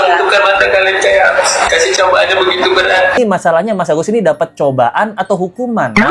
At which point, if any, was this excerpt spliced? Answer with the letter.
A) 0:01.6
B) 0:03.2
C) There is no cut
B